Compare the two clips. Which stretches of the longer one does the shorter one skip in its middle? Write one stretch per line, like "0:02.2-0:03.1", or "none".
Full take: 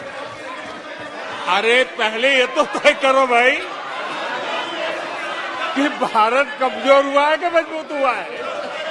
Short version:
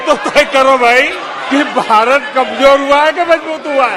0:03.9-0:05.7